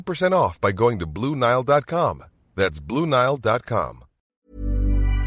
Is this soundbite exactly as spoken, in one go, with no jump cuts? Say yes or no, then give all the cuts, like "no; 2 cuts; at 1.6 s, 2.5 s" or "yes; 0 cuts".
no; 1 cut; at 4.3 s